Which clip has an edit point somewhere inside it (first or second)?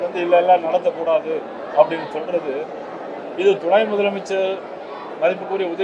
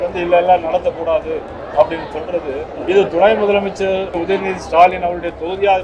second